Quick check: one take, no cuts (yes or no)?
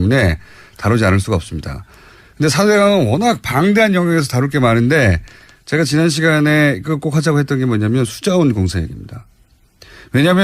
no